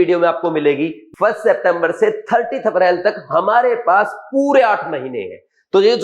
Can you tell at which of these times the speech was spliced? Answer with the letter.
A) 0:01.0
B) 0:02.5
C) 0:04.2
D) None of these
A